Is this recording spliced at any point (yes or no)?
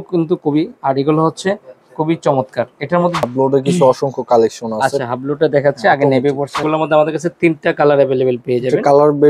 yes